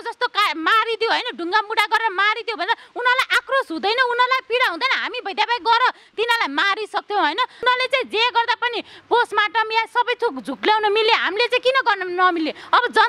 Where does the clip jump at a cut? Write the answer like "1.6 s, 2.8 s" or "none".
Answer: 7.6 s